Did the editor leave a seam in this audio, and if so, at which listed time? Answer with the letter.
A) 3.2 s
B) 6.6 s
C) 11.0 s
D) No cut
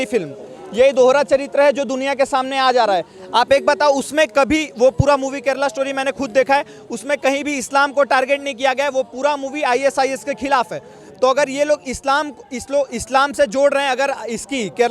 D